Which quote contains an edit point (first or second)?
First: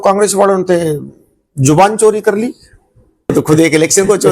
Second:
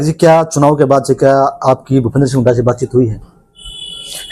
first